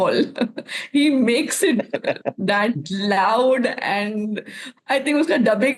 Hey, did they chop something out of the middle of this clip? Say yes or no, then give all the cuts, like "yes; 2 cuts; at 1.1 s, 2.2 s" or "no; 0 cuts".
no; 0 cuts